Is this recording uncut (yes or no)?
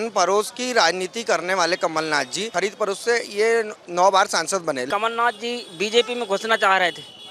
no